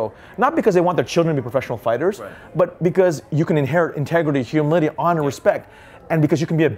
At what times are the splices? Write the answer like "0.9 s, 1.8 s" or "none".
none